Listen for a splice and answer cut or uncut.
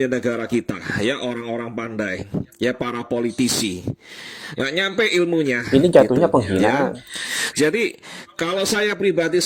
uncut